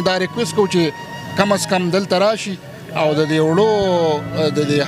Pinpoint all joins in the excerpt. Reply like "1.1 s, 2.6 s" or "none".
none